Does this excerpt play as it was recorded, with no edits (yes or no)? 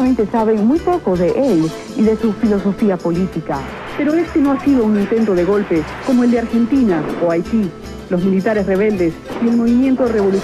no